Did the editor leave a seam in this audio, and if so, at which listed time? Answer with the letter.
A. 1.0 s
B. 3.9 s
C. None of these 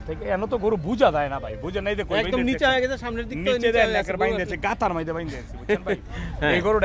C